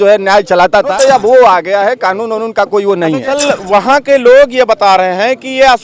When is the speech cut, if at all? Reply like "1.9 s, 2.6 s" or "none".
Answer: 0.9 s, 3.3 s